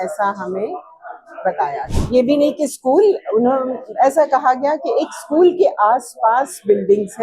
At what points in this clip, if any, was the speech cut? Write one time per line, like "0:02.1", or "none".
0:01.9